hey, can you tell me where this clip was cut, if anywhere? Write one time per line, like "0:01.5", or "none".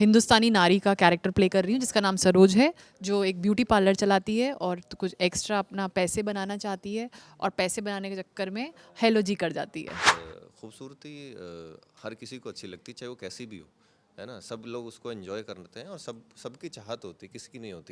0:10.1